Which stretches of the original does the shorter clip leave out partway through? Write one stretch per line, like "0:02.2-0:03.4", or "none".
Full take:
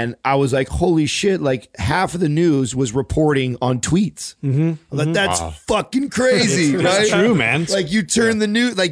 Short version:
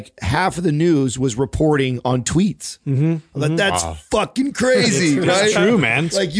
none